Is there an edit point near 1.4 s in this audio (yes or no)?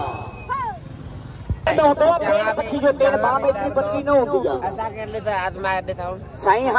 yes